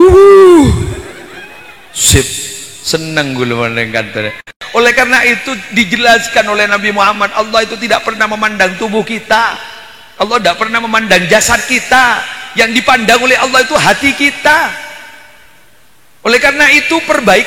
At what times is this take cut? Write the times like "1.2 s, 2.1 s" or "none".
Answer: 4.5 s

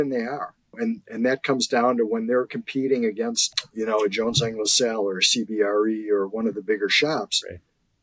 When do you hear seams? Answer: 0.8 s, 3.4 s

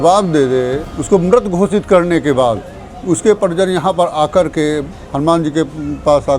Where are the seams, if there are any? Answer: 0.9 s

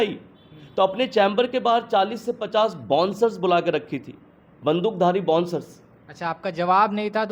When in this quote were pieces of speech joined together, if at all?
none

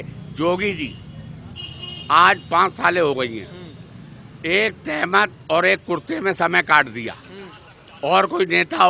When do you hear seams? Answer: none

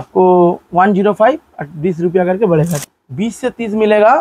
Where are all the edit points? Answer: 2.8 s

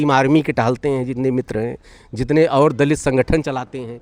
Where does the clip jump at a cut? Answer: none

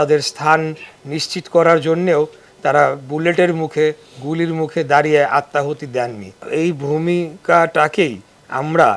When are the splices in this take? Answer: 6.5 s

